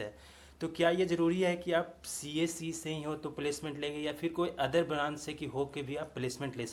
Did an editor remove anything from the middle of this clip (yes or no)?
no